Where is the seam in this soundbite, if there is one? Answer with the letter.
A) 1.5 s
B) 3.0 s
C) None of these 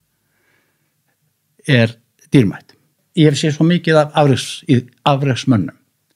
B